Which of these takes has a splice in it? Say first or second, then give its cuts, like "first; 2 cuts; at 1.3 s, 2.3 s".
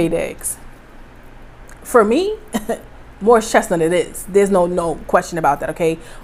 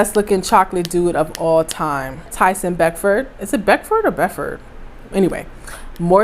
second; 1 cut; at 2.3 s